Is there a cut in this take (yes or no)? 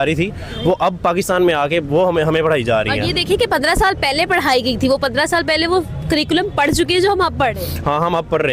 no